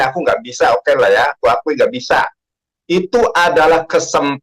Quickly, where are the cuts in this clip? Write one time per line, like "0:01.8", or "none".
none